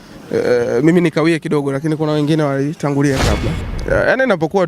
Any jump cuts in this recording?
yes; 1 cut; at 3.7 s

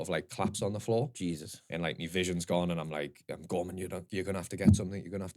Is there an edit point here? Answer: no; 0 cuts

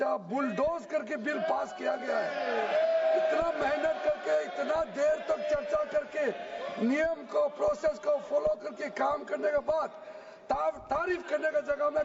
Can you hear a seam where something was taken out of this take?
no; 0 cuts

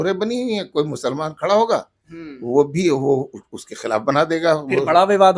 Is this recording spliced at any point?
no; 0 cuts

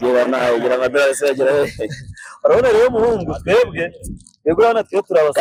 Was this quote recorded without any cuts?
yes; 0 cuts

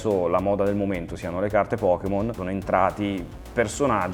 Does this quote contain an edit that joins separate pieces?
no; 0 cuts

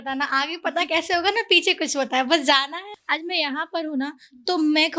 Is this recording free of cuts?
no; 1 cut; at 2.9 s

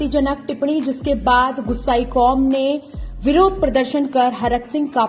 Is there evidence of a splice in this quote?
no; 0 cuts

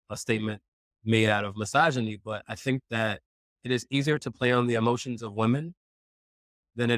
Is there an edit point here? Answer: no; 0 cuts

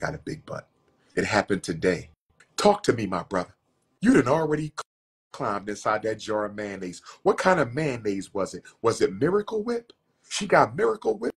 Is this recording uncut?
no; 1 cut; at 2.5 s

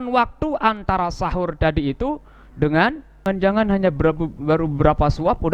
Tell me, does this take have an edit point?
yes; 1 cut; at 3.2 s

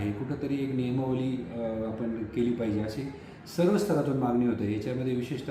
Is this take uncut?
yes; 0 cuts

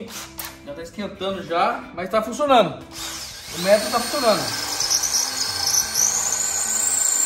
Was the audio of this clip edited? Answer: no; 0 cuts

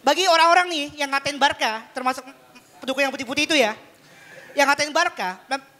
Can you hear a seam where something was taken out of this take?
no; 0 cuts

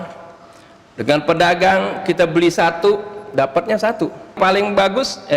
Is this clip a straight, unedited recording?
no; 1 cut; at 4.3 s

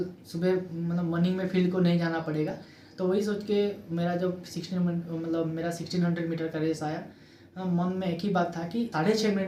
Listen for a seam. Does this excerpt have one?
no; 0 cuts

